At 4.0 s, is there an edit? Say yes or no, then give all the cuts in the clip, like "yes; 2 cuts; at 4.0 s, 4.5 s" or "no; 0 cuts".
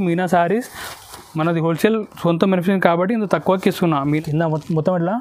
yes; 1 cut; at 4.0 s